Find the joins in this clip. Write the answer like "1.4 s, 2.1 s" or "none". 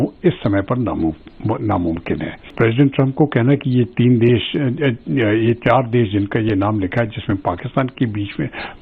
2.5 s